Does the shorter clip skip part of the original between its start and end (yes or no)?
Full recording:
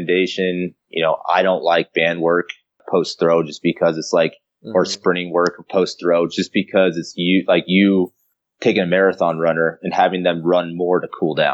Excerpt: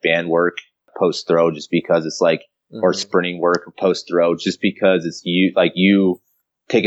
no